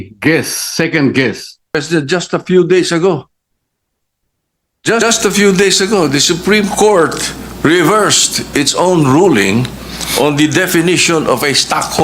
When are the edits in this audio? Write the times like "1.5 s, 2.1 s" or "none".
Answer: 1.8 s

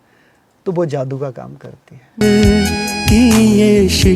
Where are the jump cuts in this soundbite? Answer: 2.2 s

